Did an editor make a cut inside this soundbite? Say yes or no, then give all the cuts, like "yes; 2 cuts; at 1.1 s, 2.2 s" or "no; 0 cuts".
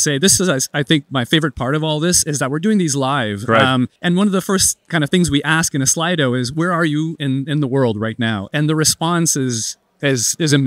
no; 0 cuts